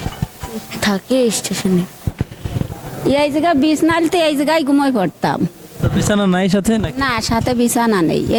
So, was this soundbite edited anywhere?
no; 0 cuts

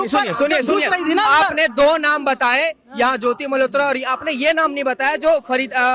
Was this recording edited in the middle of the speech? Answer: no; 0 cuts

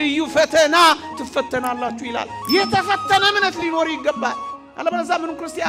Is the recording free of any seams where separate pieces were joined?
yes; 0 cuts

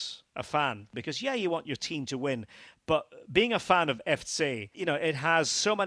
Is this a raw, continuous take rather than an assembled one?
no; 2 cuts; at 0.9 s, 4.7 s

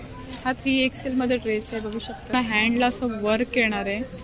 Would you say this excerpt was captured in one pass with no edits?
no; 1 cut; at 2.3 s

